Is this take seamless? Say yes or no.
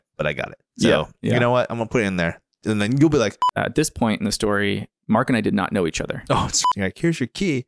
no